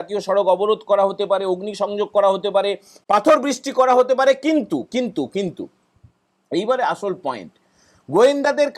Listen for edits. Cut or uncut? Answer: uncut